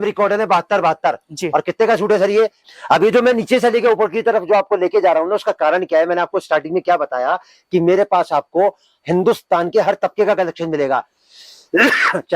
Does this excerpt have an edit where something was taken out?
yes; 1 cut; at 2.6 s

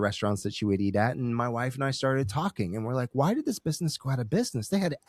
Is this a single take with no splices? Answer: yes; 0 cuts

